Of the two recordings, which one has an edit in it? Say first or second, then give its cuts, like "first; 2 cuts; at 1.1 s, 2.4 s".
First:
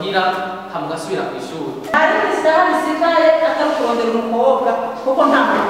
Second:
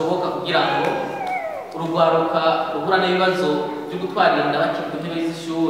first; 1 cut; at 1.9 s